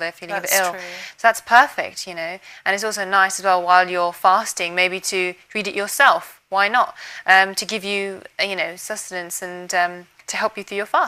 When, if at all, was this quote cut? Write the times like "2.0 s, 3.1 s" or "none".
none